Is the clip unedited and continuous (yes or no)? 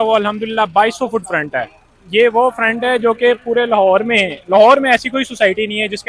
yes